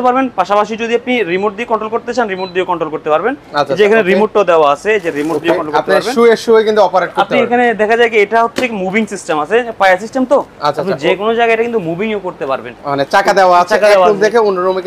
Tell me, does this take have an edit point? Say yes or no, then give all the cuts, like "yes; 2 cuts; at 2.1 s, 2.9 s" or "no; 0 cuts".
no; 0 cuts